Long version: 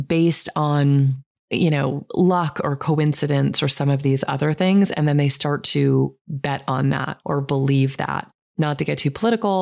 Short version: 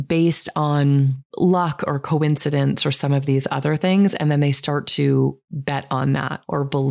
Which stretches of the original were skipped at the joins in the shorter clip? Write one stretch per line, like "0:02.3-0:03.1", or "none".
0:01.3-0:02.0